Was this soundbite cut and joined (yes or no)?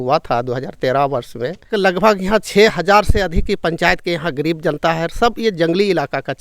yes